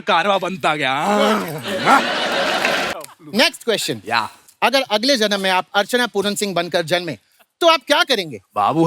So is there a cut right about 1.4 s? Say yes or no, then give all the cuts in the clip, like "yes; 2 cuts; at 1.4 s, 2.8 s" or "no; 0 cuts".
no; 1 cut; at 2.9 s